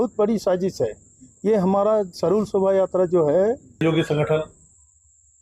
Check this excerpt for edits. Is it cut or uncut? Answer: cut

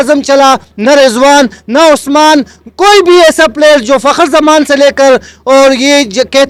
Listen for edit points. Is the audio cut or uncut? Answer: uncut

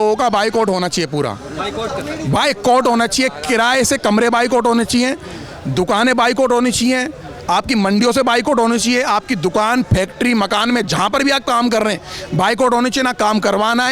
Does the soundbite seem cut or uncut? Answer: uncut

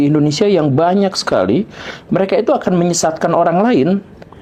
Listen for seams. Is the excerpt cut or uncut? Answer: uncut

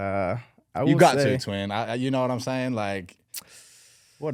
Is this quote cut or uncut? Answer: uncut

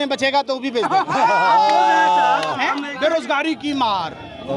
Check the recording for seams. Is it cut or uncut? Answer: cut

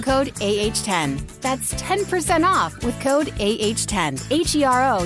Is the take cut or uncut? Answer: cut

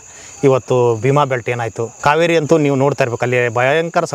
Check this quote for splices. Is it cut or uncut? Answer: cut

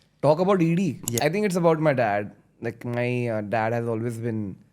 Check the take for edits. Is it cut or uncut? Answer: cut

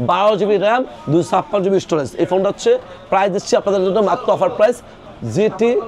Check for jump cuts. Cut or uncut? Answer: cut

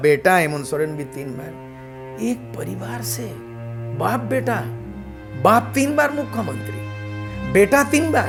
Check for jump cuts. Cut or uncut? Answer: uncut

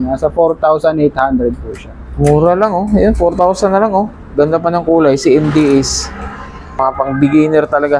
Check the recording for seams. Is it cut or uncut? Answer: uncut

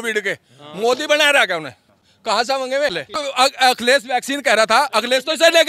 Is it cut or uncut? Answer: cut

